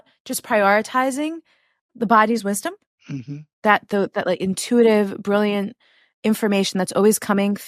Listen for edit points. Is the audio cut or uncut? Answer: uncut